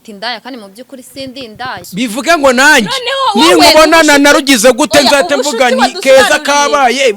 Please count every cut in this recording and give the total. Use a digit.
1